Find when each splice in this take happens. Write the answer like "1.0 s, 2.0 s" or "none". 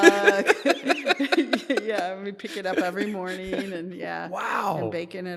none